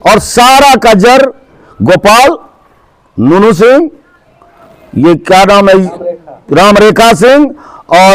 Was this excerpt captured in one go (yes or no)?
yes